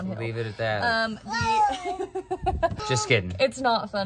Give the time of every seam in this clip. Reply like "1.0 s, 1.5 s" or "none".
2.8 s